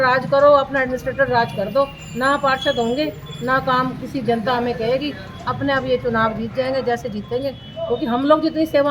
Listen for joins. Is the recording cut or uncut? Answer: uncut